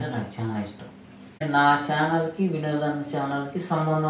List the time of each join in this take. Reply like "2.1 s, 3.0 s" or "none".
1.4 s